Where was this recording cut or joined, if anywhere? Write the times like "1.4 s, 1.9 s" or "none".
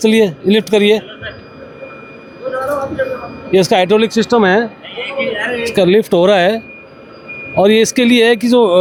none